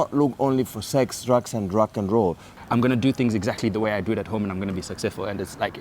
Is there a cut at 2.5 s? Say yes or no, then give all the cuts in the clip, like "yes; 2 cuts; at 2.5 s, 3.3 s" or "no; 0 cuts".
yes; 1 cut; at 2.5 s